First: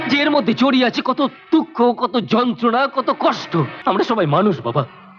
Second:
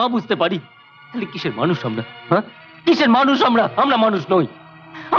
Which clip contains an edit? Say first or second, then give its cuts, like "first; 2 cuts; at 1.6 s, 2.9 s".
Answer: first; 1 cut; at 3.7 s